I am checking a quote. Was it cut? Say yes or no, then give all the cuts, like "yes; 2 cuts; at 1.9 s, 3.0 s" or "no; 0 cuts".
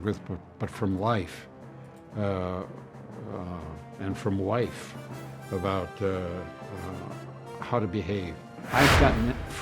yes; 1 cut; at 8.5 s